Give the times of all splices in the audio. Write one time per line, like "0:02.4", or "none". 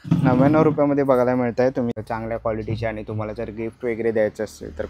0:02.0